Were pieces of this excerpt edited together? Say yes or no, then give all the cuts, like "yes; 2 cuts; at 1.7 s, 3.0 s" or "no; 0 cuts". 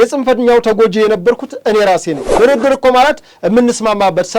yes; 1 cut; at 2.3 s